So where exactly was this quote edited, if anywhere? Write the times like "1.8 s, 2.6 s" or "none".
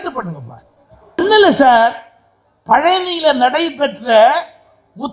1.2 s